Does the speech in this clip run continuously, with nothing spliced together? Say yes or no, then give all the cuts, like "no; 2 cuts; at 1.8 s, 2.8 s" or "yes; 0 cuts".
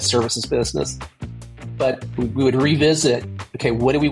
yes; 0 cuts